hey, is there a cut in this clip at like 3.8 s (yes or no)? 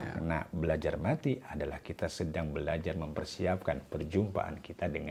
no